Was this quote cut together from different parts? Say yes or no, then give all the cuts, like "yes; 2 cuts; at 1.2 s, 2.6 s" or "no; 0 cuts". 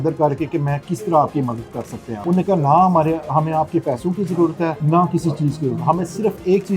yes; 2 cuts; at 2.0 s, 4.8 s